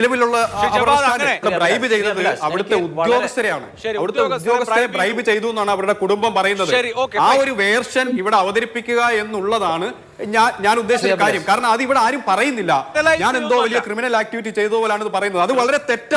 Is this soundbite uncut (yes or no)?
no